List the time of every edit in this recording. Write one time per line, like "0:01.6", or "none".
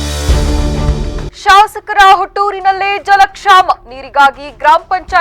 0:01.3

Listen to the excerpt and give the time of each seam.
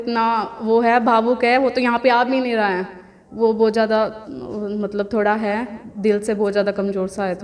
none

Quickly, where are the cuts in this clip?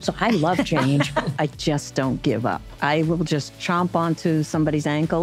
0:01.3
0:02.7

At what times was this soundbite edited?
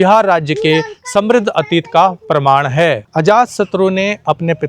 0:03.0

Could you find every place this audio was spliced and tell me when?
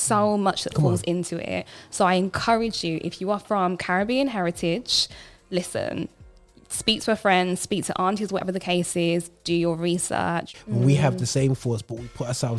0:10.5

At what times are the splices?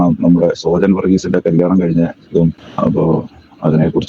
0:02.6

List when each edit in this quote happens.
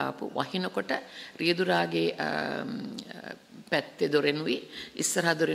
none

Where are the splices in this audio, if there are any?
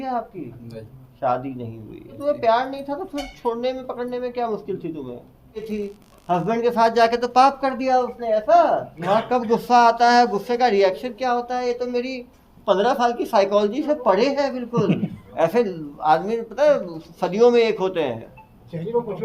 0:02.1
0:05.6
0:08.9
0:15.2

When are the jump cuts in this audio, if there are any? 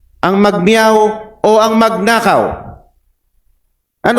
none

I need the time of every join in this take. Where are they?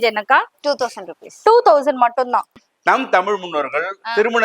0:02.6

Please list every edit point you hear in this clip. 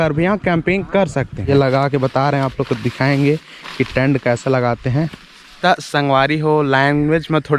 0:01.5
0:05.4

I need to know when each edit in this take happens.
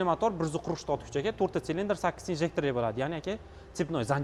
none

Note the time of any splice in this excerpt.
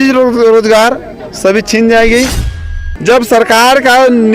0:02.6

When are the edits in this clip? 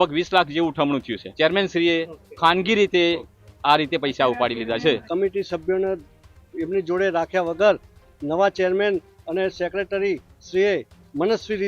0:01.2
0:05.0

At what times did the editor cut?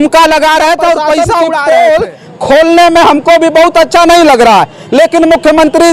0:01.5

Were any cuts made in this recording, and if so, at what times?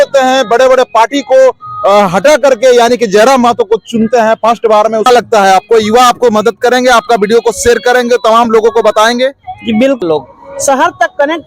0:05.1
0:10.0

